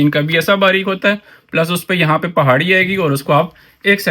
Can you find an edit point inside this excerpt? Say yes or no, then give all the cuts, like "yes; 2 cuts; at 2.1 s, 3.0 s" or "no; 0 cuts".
no; 0 cuts